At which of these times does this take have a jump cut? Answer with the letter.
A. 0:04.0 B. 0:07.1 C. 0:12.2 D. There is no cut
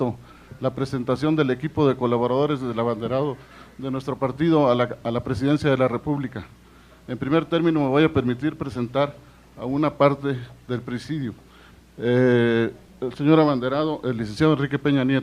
A